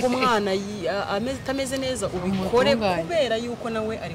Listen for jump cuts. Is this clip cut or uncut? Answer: uncut